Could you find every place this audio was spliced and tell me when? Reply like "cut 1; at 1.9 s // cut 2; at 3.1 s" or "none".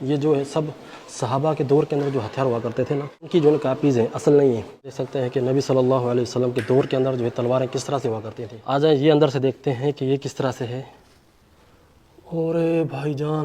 cut 1; at 3.1 s // cut 2; at 5.0 s // cut 3; at 8.7 s